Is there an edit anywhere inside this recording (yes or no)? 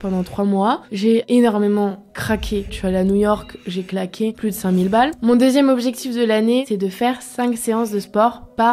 yes